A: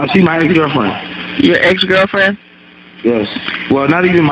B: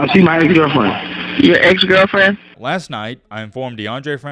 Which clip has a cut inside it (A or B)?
B